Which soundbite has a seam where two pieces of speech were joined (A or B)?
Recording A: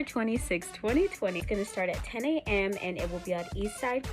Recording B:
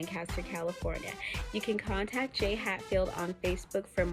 A